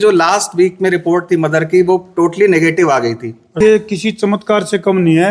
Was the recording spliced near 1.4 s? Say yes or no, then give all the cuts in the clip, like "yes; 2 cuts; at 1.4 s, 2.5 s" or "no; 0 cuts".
no; 1 cut; at 3.6 s